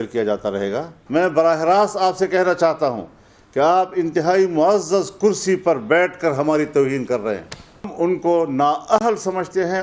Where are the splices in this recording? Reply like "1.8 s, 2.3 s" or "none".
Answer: 0.9 s, 7.9 s